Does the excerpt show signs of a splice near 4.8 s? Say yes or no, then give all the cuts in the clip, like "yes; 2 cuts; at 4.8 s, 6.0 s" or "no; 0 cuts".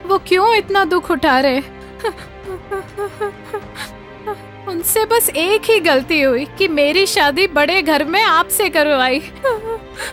no; 0 cuts